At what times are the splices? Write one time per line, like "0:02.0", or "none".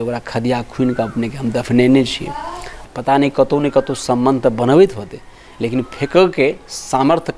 0:02.8